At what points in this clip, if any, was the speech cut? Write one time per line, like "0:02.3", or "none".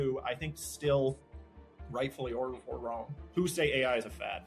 0:03.2